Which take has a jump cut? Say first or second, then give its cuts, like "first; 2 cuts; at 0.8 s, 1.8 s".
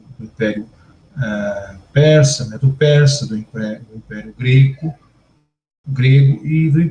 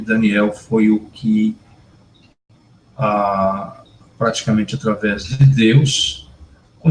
second; 1 cut; at 2.8 s